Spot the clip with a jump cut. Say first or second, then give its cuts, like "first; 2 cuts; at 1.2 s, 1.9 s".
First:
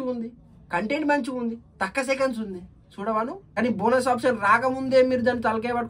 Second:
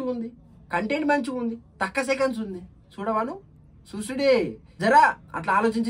first; 1 cut; at 3.4 s